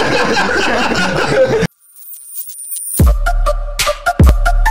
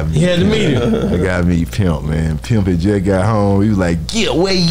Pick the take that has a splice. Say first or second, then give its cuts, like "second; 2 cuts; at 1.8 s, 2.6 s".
first; 1 cut; at 1.7 s